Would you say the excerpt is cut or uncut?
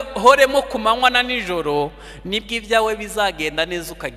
uncut